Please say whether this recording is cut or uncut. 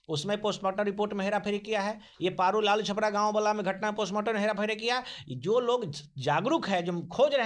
uncut